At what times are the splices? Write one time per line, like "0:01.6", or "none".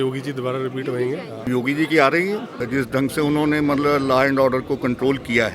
0:01.3
0:02.5

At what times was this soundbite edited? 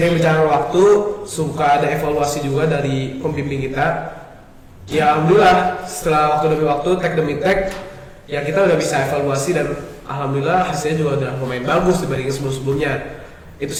none

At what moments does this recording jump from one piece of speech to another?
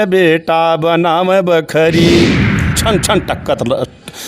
0:02.8

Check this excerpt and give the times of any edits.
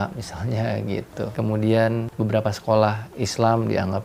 0:01.3
0:02.1

